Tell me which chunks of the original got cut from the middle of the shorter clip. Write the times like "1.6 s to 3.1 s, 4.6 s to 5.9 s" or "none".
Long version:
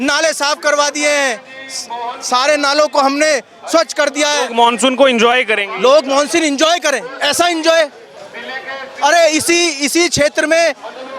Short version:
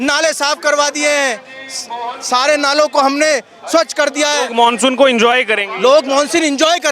none